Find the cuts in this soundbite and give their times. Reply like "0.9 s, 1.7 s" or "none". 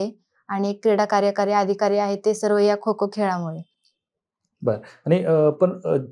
none